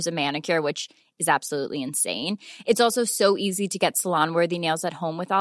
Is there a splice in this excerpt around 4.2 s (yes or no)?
no